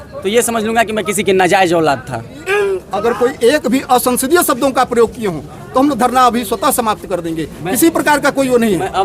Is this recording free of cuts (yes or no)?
no